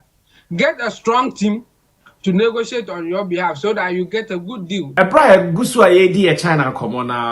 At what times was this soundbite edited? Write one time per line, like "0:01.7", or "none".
0:04.9